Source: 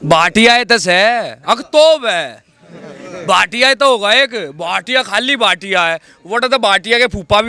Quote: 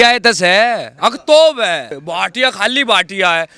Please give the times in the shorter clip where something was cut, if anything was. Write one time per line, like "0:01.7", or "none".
0:02.0